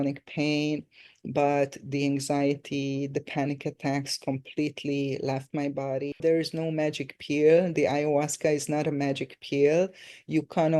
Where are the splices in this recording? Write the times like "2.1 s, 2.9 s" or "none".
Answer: 6.1 s